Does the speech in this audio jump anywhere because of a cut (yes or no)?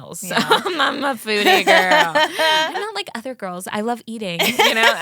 yes